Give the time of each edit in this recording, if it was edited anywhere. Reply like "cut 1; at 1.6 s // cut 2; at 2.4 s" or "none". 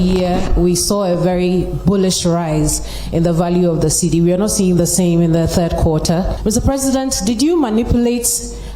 cut 1; at 6.3 s